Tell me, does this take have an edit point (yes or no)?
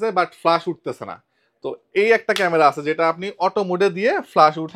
no